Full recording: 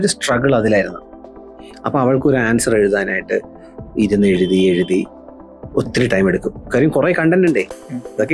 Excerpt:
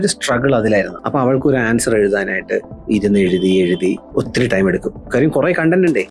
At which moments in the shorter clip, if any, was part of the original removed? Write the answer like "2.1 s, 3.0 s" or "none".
1.0 s, 2.7 s, 4.0 s